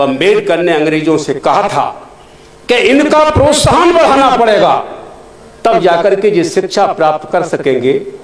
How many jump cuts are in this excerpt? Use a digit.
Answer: 0